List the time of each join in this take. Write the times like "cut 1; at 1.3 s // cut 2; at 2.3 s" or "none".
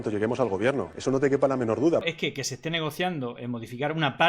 cut 1; at 0.9 s // cut 2; at 2.0 s